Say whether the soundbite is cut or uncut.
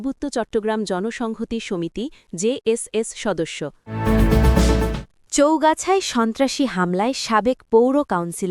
cut